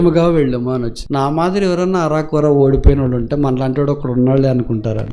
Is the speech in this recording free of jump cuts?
no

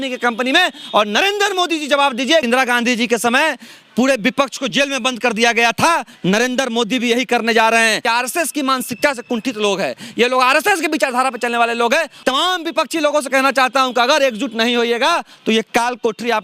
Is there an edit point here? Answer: yes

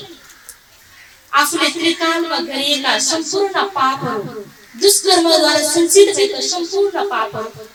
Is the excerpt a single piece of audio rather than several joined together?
yes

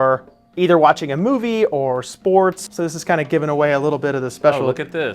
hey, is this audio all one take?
no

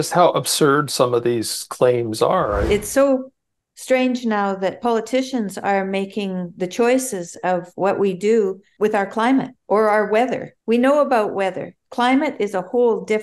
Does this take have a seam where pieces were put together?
yes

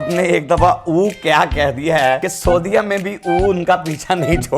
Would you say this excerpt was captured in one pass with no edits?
no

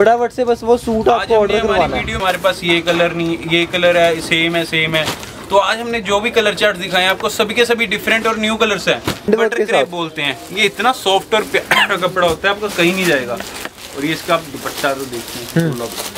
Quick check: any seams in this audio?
yes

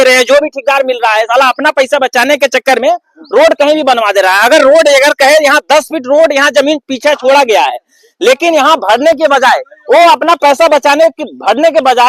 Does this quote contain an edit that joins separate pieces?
no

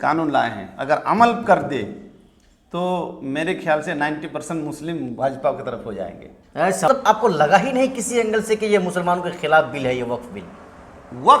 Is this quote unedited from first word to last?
no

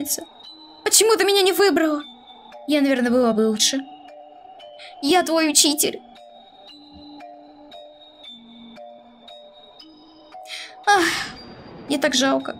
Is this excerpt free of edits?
yes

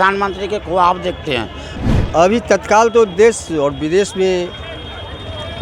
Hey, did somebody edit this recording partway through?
yes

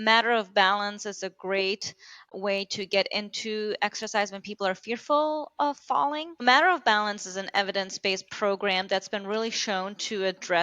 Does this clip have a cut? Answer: yes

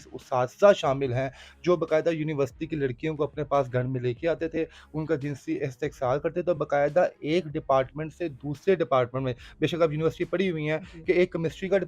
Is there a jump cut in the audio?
no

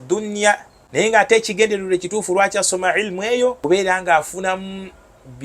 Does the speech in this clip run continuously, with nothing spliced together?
no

